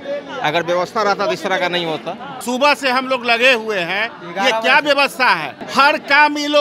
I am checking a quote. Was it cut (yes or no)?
yes